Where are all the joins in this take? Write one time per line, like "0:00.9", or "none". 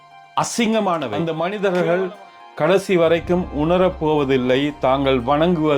0:01.1